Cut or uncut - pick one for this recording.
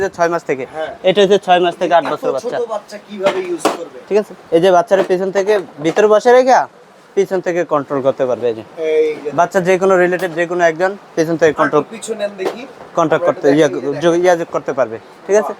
uncut